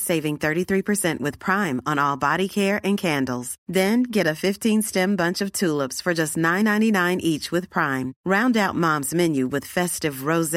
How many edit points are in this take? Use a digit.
0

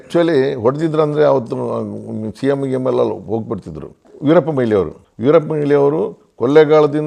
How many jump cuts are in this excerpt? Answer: 0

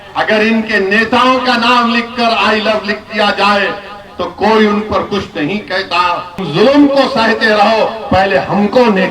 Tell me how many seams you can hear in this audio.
1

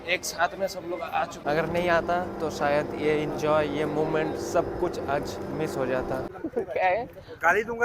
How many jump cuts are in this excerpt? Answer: 2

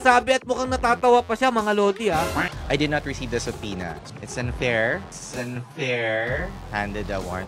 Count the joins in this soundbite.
3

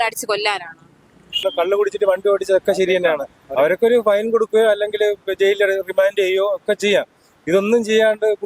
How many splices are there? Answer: 1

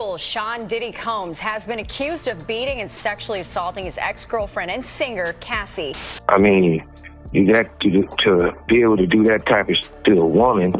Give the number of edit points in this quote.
1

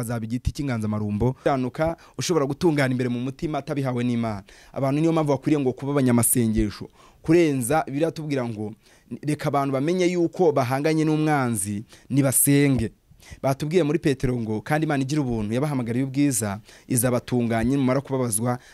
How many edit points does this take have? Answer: 1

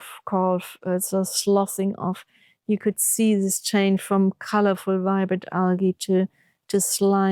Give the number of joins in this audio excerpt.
0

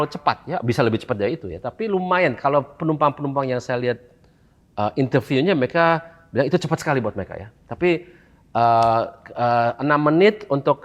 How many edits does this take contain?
0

